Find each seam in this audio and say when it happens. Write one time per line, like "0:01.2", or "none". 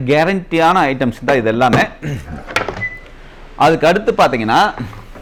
none